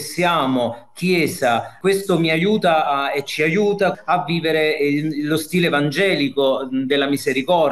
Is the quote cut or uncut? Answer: uncut